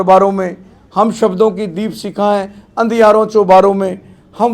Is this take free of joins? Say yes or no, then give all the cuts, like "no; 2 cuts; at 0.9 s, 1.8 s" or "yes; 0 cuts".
yes; 0 cuts